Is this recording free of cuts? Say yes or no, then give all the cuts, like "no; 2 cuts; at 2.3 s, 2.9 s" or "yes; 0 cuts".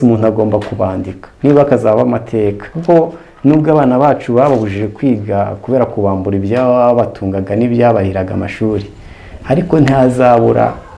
no; 1 cut; at 2.7 s